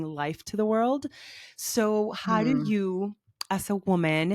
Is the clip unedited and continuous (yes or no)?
yes